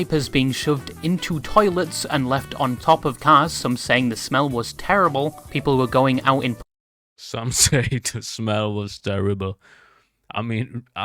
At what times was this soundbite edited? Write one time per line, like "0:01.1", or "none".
none